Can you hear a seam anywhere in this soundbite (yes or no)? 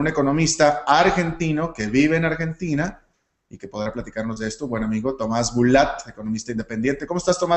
yes